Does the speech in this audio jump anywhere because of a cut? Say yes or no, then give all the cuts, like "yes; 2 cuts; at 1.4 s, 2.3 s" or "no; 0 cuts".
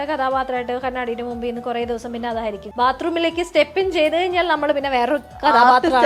yes; 1 cut; at 2.6 s